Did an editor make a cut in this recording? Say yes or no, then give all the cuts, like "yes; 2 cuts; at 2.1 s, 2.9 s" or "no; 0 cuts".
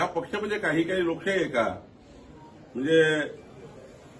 no; 0 cuts